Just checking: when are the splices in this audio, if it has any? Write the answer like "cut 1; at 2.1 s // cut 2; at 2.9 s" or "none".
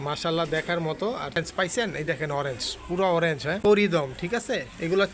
cut 1; at 1.4 s // cut 2; at 3.6 s